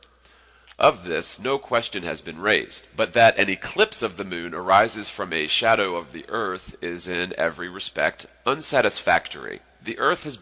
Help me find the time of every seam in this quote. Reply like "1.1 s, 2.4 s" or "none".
5.9 s